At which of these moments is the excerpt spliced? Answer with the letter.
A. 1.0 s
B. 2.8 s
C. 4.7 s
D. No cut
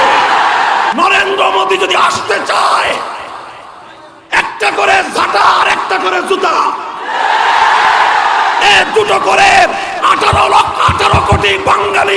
A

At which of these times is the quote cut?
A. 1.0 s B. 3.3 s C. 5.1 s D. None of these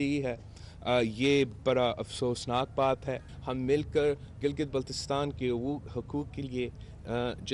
B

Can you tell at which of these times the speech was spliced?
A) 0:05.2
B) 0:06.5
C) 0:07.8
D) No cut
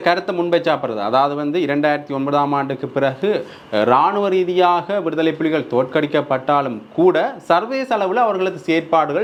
D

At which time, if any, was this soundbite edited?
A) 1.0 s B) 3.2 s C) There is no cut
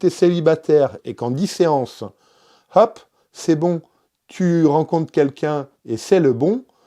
A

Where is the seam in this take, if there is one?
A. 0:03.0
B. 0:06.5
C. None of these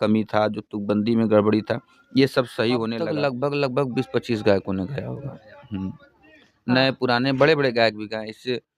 A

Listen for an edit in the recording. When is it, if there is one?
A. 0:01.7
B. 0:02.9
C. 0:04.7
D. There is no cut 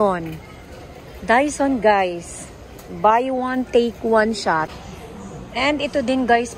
C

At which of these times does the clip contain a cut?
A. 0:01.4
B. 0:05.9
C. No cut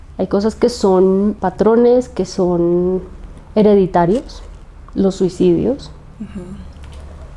A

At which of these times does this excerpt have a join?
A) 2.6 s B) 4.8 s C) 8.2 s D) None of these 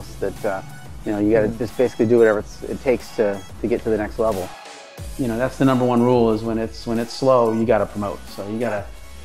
B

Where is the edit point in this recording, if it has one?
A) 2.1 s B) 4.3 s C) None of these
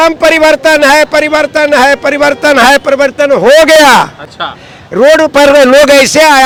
C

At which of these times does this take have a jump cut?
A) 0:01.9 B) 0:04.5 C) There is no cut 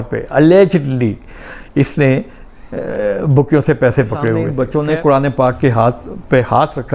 B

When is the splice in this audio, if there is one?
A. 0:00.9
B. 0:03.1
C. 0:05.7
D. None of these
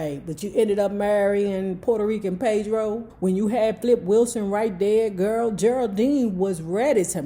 B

